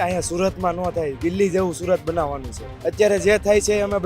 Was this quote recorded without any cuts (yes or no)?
no